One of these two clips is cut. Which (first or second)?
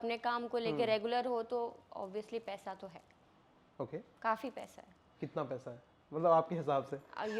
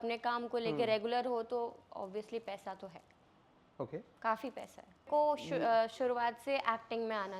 second